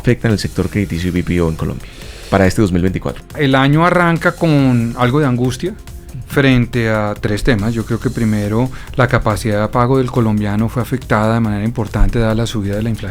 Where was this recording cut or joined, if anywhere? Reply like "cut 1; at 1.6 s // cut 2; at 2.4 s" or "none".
cut 1; at 3.3 s